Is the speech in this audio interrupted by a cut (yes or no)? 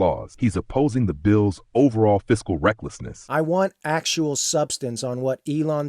yes